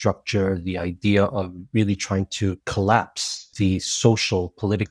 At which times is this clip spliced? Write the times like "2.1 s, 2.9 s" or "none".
2.6 s, 3.5 s

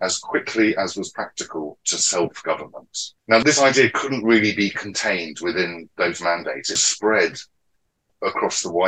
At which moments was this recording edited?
3.3 s, 6.8 s

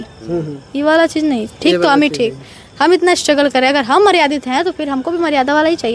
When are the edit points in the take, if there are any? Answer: none

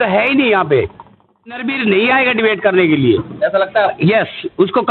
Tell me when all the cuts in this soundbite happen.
1.7 s

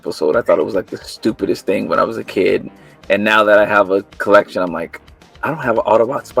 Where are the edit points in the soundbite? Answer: none

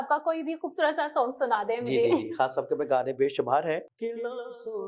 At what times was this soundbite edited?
3.9 s

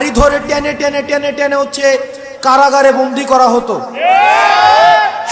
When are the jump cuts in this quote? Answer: none

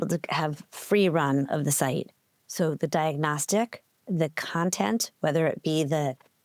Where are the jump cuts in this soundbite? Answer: 4.0 s

